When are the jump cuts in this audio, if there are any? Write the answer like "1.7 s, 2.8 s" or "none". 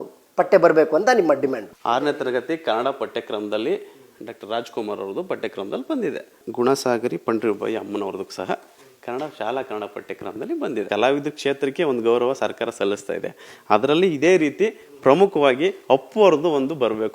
1.7 s, 6.4 s, 10.9 s